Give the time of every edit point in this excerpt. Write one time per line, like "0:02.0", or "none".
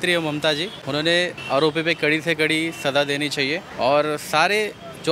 0:01.0
0:03.7